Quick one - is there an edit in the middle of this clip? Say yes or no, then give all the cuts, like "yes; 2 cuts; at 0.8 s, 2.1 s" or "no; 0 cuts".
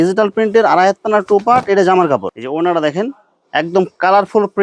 yes; 1 cut; at 2.3 s